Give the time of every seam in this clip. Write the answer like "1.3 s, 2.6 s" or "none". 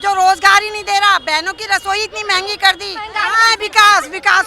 3.2 s